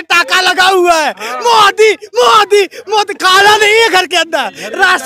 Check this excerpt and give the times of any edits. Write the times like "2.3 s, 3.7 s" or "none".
none